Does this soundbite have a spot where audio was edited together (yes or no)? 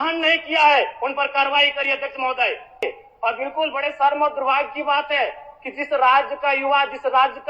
yes